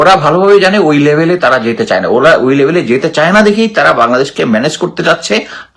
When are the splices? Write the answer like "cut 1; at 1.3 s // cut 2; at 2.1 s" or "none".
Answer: none